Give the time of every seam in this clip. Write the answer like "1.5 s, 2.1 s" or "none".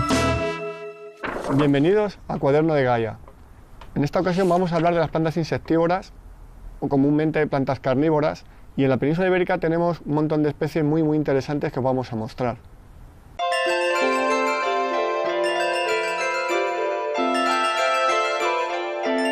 1.3 s